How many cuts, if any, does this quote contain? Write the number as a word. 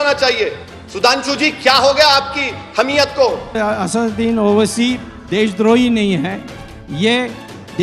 one